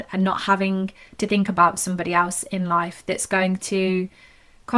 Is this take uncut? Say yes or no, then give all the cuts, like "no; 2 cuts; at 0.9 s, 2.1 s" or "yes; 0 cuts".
yes; 0 cuts